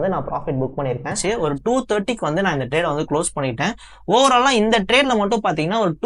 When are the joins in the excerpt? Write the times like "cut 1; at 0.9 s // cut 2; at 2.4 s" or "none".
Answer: cut 1; at 1.2 s